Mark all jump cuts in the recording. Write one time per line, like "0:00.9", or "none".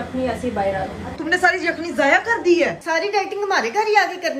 0:02.8